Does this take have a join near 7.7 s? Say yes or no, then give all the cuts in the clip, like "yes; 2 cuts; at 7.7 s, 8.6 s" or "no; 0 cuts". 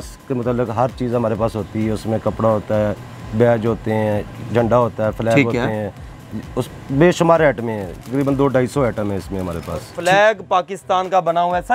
no; 1 cut; at 9.9 s